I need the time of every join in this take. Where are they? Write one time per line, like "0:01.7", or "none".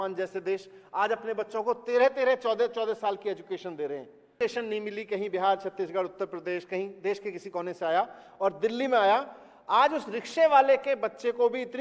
0:04.3

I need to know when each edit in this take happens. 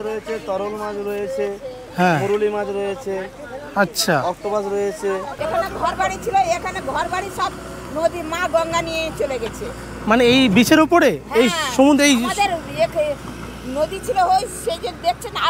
0:05.4

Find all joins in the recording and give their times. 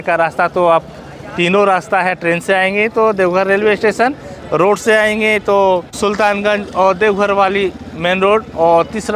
0:05.9

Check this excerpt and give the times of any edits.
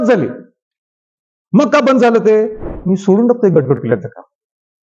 0:02.7

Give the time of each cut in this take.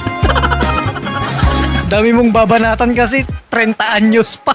0:01.8

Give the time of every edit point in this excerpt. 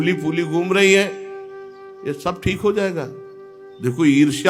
none

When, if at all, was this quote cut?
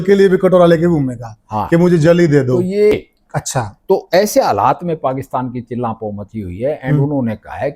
0:02.9

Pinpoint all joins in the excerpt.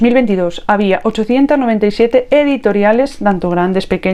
none

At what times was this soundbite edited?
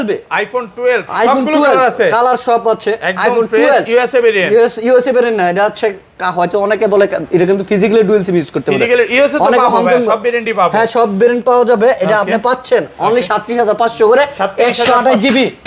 none

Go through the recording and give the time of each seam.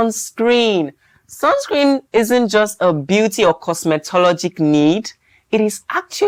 none

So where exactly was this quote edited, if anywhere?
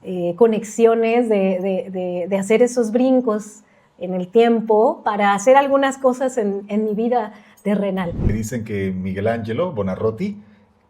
0:08.2

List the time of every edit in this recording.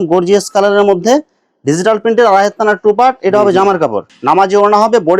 0:04.1

